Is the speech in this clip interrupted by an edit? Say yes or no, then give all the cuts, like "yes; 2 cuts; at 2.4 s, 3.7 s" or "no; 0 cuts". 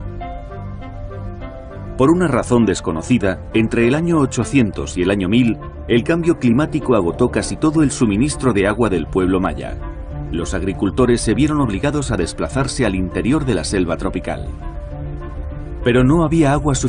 no; 0 cuts